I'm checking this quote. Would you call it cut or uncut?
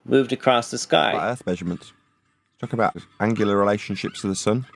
cut